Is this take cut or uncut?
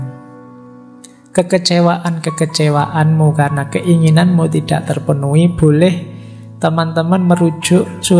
uncut